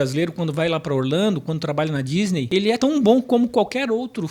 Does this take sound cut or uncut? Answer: cut